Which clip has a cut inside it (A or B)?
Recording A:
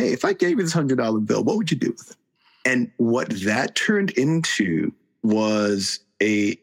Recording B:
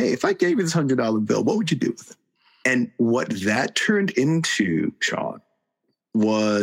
A